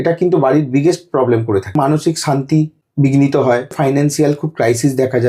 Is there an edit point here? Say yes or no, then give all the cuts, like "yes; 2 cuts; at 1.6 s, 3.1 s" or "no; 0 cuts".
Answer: yes; 3 cuts; at 1.8 s, 2.8 s, 3.8 s